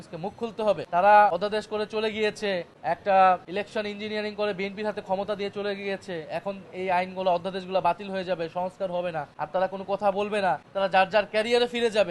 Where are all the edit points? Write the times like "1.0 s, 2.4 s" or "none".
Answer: 0.8 s, 1.3 s, 2.7 s, 3.5 s, 9.3 s, 10.7 s